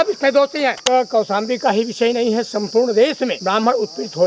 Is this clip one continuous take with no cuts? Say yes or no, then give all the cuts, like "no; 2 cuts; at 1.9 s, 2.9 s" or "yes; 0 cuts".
no; 2 cuts; at 0.8 s, 3.4 s